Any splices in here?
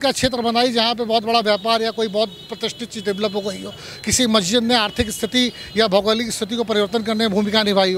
no; 0 cuts

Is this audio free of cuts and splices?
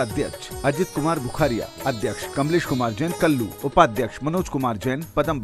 no; 2 cuts; at 2.2 s, 3.5 s

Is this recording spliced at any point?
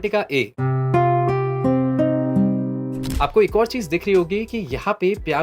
yes; 1 cut; at 3.1 s

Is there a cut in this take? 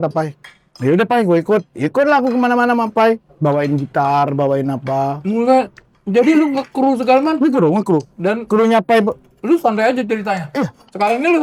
no; 0 cuts

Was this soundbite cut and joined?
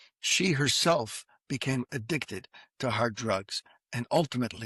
no; 0 cuts

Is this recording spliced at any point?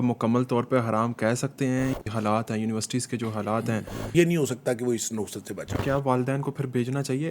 yes; 3 cuts; at 2.0 s, 3.9 s, 5.8 s

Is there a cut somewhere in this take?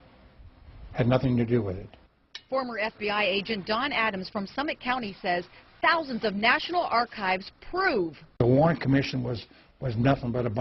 yes; 1 cut; at 7.1 s

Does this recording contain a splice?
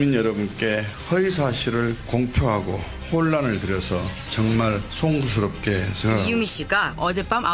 no; 0 cuts

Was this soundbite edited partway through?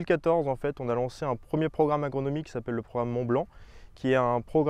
no; 0 cuts

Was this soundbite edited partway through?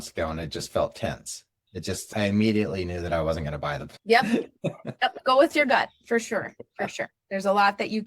yes; 1 cut; at 2.0 s

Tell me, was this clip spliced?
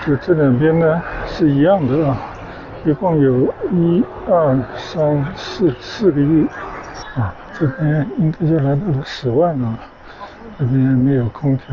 yes; 1 cut; at 7.0 s

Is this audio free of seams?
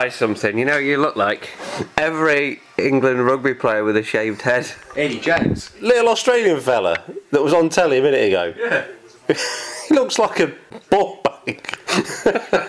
no; 4 cuts; at 1.6 s, 4.8 s, 5.7 s, 10.7 s

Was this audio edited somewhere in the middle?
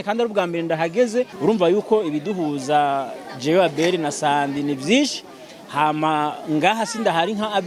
yes; 1 cut; at 1.3 s

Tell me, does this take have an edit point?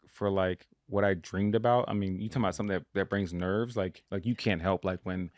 yes; 1 cut; at 4.0 s

